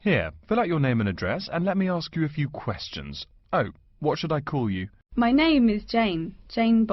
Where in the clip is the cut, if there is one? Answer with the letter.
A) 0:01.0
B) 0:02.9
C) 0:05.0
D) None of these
C